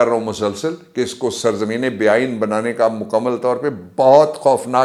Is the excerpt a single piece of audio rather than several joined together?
yes; 0 cuts

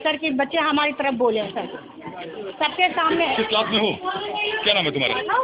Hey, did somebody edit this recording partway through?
no; 0 cuts

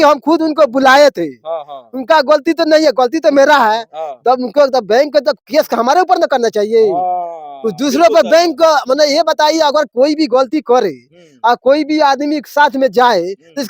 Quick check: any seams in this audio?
no; 0 cuts

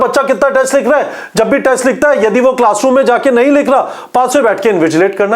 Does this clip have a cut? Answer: no; 0 cuts

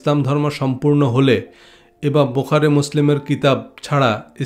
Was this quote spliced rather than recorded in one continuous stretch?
no; 0 cuts

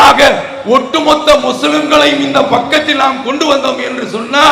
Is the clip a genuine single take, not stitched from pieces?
yes; 0 cuts

